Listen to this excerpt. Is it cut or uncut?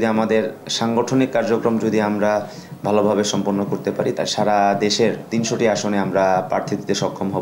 cut